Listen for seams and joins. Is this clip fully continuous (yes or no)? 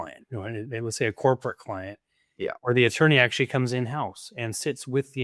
yes